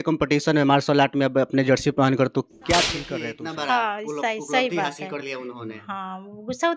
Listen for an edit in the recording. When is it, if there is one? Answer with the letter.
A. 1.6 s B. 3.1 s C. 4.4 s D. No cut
B